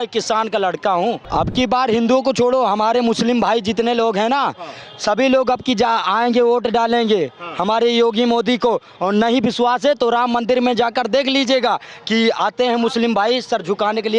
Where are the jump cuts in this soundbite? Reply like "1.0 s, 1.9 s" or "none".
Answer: 1.2 s